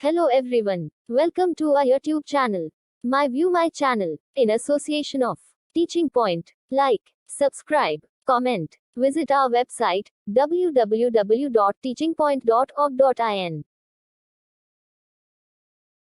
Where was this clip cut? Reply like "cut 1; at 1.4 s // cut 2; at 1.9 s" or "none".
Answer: cut 1; at 1.2 s